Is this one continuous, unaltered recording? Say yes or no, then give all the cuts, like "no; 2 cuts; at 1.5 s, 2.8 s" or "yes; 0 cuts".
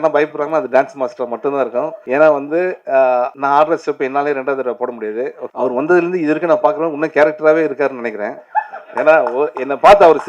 no; 3 cuts; at 2.0 s, 3.4 s, 5.4 s